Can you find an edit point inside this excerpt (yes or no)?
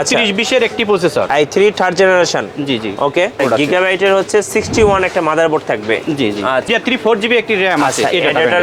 yes